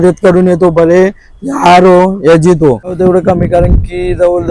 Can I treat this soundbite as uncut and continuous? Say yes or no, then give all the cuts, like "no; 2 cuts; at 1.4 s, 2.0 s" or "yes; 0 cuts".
no; 1 cut; at 3.0 s